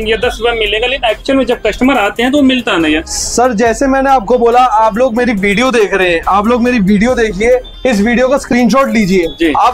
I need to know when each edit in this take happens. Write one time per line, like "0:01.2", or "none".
none